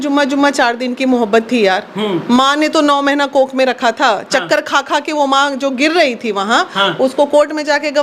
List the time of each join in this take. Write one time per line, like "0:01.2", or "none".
none